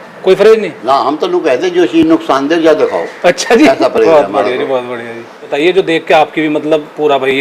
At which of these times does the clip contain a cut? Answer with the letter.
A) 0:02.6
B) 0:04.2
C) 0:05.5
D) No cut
C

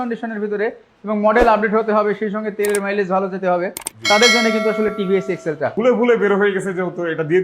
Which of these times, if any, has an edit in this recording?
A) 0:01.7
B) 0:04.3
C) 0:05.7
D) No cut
C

